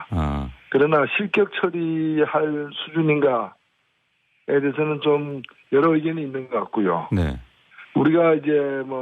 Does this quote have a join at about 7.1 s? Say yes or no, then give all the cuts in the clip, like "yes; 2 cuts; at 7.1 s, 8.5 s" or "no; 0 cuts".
yes; 1 cut; at 7.1 s